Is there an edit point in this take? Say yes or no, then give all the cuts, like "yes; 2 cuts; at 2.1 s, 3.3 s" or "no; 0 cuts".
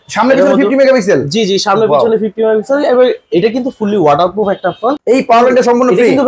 yes; 1 cut; at 5.0 s